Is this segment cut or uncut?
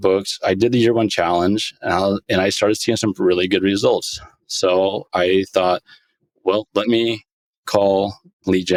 uncut